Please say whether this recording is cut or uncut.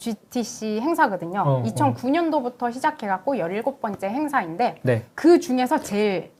uncut